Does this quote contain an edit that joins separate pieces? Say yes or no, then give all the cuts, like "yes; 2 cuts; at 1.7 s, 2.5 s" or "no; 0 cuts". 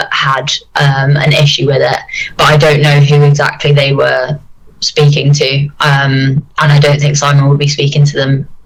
no; 0 cuts